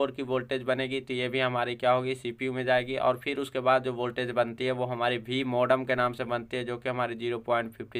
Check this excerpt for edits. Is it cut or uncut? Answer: uncut